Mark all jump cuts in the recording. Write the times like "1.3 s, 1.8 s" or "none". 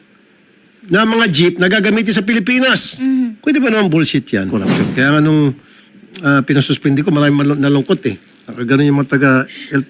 4.5 s